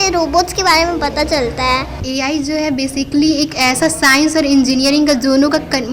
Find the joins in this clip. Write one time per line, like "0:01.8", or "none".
0:01.9